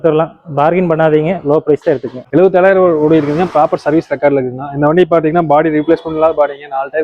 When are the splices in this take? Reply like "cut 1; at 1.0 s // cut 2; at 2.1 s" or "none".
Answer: cut 1; at 2.1 s